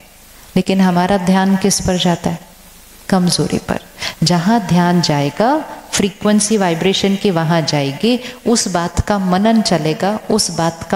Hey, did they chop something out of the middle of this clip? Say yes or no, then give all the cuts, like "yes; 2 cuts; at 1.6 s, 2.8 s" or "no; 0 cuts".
no; 0 cuts